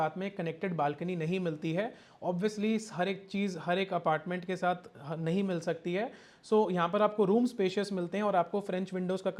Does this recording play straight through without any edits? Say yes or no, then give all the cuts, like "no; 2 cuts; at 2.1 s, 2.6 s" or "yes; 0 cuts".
yes; 0 cuts